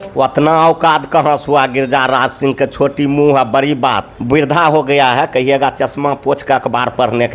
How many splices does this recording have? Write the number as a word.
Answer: one